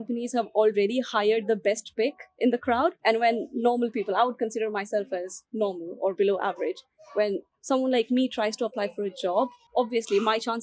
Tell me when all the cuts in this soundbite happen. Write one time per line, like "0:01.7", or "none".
none